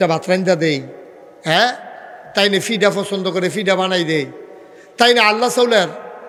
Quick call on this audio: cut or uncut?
uncut